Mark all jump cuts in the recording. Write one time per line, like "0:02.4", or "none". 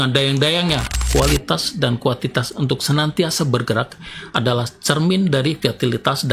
0:01.0